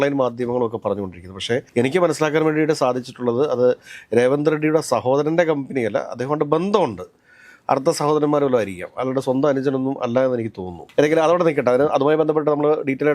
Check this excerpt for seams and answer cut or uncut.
uncut